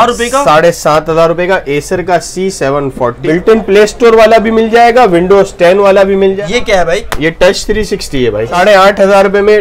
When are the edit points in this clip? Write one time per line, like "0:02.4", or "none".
0:03.2
0:06.4
0:08.5

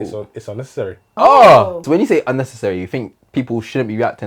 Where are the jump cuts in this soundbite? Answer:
0:01.2
0:01.8

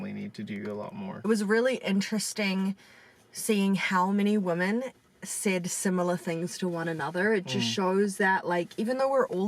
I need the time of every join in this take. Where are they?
0:01.3

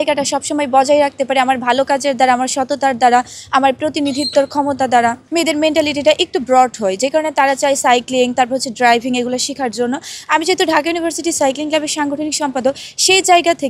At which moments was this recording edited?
0:05.2

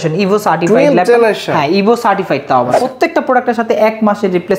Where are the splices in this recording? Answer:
0:02.8

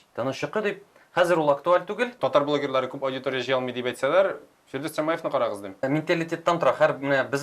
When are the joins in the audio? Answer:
0:02.1
0:05.8

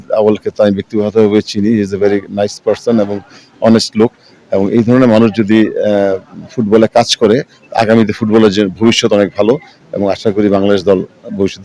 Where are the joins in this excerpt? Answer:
none

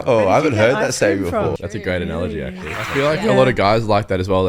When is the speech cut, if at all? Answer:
0:01.6
0:02.8

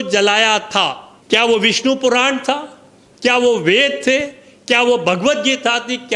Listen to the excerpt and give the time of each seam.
0:01.1

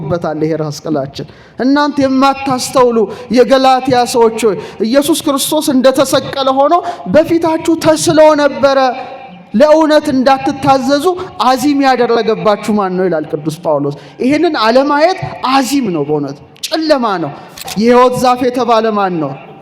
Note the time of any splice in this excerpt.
0:17.6

